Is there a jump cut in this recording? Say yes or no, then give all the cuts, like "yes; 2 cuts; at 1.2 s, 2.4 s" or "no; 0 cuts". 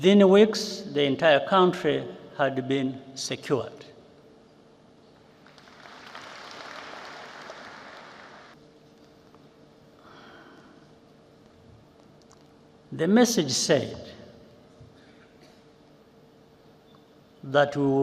yes; 1 cut; at 8.5 s